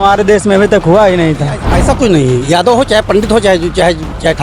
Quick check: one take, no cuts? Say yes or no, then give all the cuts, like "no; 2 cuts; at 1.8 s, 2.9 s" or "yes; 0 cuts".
no; 1 cut; at 1.7 s